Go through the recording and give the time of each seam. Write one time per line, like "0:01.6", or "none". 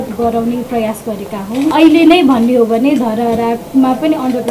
0:01.7

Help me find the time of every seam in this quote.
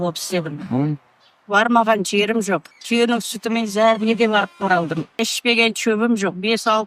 0:02.7
0:05.1

